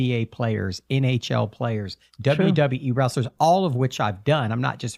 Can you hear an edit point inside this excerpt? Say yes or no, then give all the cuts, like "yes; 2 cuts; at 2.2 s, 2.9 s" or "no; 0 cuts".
no; 0 cuts